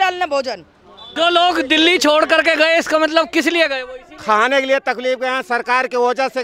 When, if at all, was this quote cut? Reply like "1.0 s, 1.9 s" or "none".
1.0 s